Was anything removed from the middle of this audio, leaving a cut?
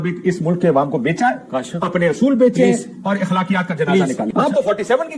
yes; 1 cut; at 4.3 s

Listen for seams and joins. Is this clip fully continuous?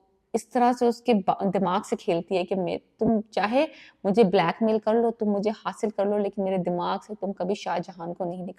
yes; 0 cuts

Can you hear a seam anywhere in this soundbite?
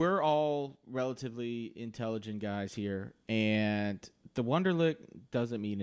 no; 0 cuts

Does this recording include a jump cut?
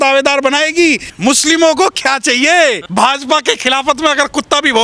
yes; 2 cuts; at 1.1 s, 2.8 s

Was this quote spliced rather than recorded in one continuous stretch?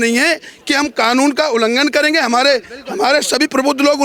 no; 0 cuts

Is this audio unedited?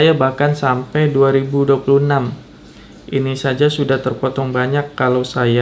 yes; 0 cuts

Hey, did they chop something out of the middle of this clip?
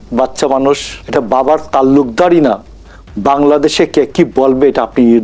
yes; 1 cut; at 0.9 s

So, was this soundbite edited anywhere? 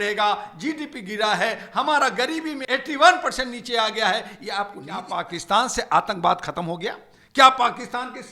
yes; 2 cuts; at 2.6 s, 5.1 s

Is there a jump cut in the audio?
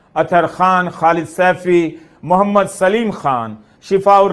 no; 0 cuts

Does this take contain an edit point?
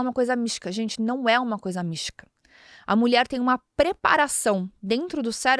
no; 0 cuts

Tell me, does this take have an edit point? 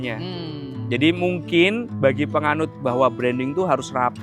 yes; 2 cuts; at 1.9 s, 2.8 s

